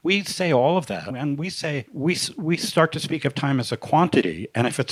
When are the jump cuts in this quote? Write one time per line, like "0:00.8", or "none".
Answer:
none